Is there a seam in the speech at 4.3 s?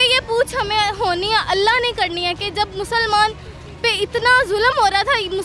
no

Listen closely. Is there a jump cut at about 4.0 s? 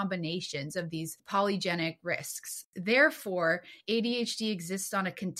no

